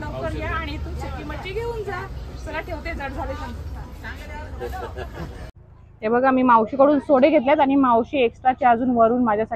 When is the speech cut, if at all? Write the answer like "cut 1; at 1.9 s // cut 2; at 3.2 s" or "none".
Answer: cut 1; at 5.4 s

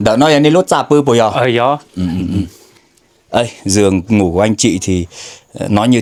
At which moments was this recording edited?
none

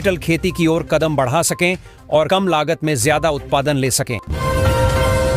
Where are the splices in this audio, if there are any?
cut 1; at 4.3 s

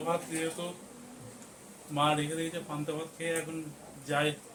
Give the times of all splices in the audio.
none

